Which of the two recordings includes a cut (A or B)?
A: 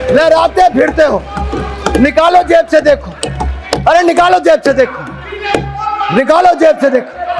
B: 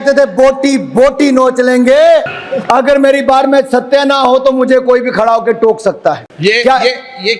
B